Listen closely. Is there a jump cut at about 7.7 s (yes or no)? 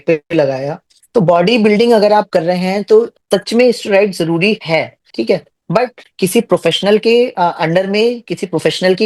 no